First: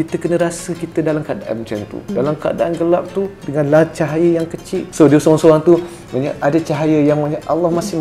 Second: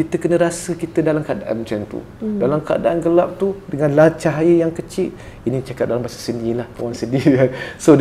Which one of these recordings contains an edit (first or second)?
first